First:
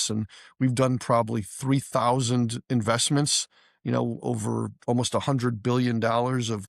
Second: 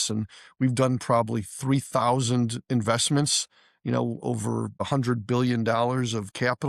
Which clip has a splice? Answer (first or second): second